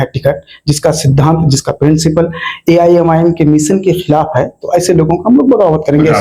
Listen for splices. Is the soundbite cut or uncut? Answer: uncut